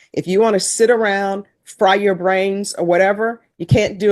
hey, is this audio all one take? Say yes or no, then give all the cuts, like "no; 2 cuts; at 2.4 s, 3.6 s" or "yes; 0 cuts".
yes; 0 cuts